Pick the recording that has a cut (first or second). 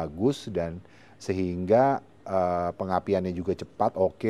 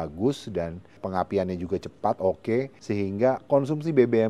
second